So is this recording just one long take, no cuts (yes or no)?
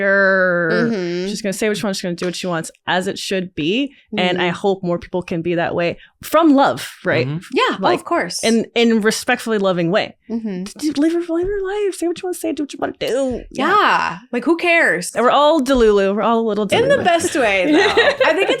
no